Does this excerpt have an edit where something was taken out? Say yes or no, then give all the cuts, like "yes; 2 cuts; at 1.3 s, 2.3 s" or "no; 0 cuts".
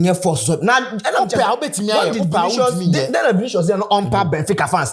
no; 0 cuts